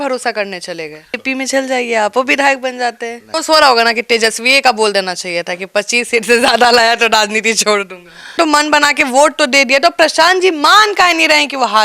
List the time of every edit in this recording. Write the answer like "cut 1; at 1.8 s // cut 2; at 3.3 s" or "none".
cut 1; at 1.2 s // cut 2; at 3.3 s // cut 3; at 8.4 s